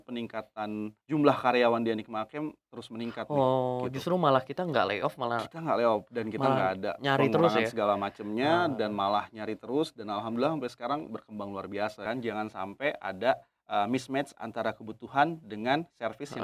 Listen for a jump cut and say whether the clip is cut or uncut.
cut